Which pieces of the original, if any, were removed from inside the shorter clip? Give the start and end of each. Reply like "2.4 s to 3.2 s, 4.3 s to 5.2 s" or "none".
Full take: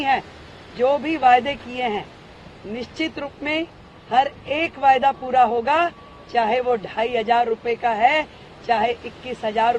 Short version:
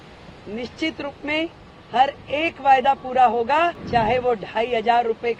6.0 s to 6.2 s